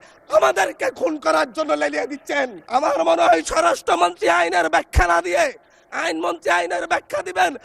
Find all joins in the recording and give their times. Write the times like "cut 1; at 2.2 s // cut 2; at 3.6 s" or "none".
cut 1; at 2.6 s